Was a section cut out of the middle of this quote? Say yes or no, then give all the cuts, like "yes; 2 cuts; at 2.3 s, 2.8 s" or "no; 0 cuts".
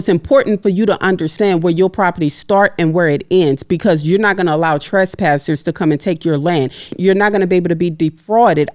yes; 1 cut; at 6.9 s